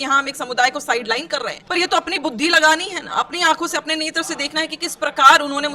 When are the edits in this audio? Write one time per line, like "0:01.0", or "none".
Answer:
0:01.6